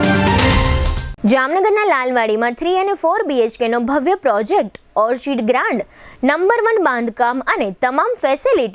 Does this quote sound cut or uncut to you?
cut